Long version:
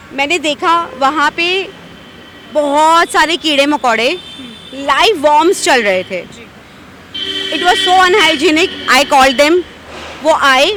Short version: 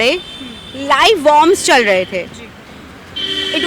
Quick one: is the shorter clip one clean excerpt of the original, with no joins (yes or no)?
yes